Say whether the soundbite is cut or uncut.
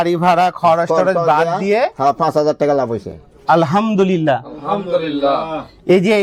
uncut